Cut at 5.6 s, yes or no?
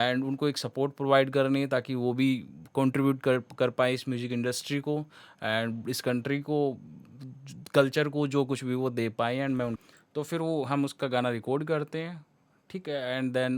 no